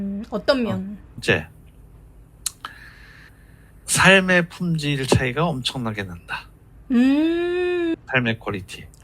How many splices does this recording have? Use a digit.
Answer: 2